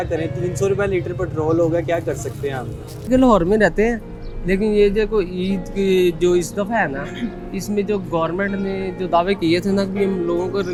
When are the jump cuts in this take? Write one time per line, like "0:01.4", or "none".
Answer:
none